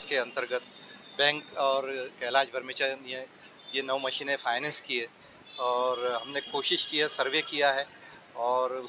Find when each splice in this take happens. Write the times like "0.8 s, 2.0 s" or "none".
none

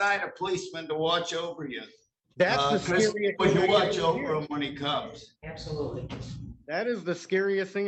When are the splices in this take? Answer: none

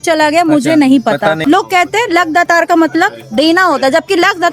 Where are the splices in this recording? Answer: 1.4 s

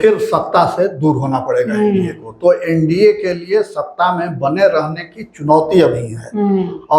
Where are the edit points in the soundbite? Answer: none

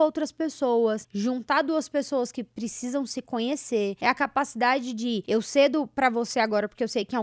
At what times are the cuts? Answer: 1.1 s, 4.0 s, 5.2 s

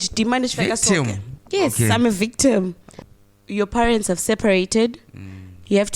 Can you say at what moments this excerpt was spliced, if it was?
3.0 s

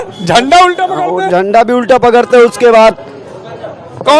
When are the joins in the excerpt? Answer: none

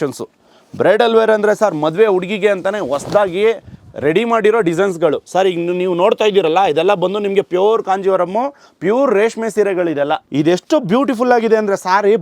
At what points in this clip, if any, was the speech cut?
10.2 s

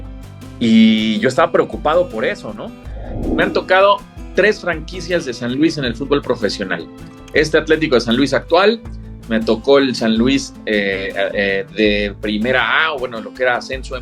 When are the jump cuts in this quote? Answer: 3.3 s

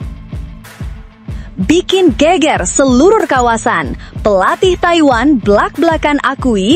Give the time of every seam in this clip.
1.5 s

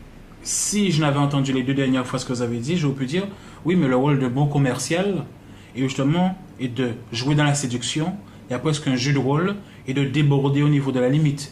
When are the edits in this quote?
6.1 s

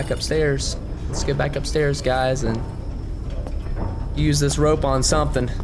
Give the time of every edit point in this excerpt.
none

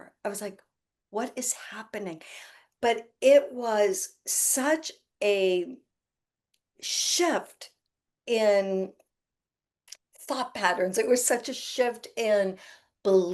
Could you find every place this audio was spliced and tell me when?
none

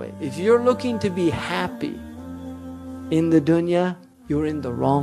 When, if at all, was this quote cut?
4.1 s

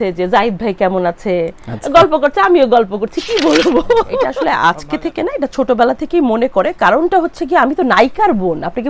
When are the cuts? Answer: 4.3 s

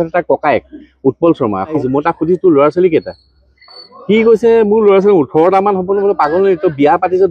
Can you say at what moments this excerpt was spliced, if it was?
1.8 s

